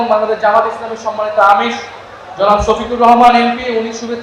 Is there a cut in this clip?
no; 0 cuts

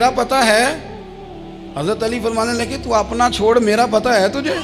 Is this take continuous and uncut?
yes; 0 cuts

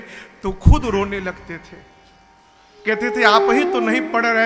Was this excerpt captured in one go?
yes; 0 cuts

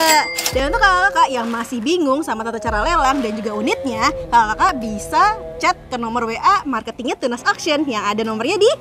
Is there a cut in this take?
no; 0 cuts

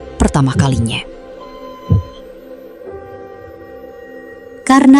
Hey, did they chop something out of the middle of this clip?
no; 0 cuts

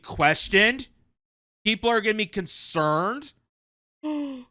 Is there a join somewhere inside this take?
no; 0 cuts

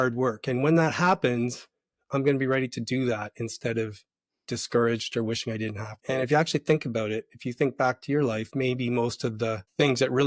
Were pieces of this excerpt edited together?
no; 0 cuts

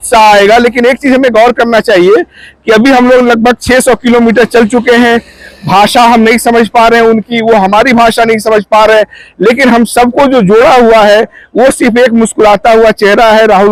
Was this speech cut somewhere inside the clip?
no; 0 cuts

